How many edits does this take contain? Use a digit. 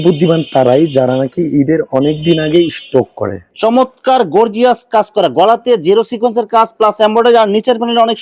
1